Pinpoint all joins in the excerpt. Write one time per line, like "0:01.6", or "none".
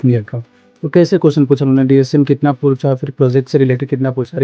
none